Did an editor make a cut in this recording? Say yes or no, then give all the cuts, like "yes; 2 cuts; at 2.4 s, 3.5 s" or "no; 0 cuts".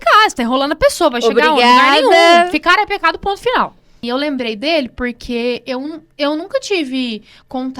yes; 1 cut; at 4.0 s